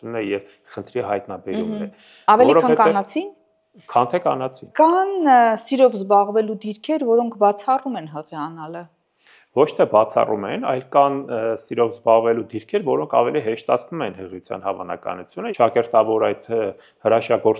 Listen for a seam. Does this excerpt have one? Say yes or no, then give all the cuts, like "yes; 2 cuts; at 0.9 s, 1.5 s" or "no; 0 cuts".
yes; 2 cuts; at 4.6 s, 15.4 s